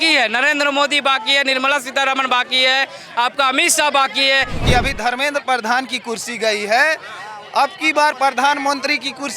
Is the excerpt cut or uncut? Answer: cut